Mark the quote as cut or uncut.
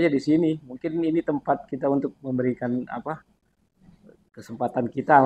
uncut